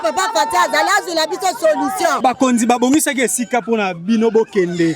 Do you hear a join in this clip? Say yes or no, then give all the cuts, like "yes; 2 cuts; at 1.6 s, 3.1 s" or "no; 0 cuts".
yes; 1 cut; at 2.2 s